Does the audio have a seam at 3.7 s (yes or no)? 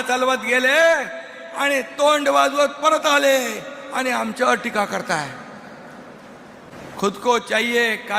no